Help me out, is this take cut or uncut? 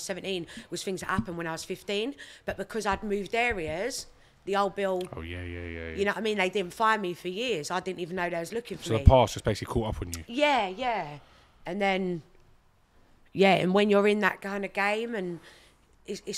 uncut